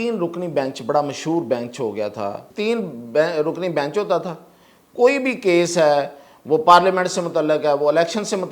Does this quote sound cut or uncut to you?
cut